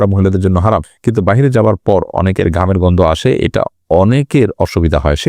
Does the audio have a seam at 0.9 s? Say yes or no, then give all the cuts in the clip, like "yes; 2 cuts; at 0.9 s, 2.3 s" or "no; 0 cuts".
yes; 1 cut; at 0.9 s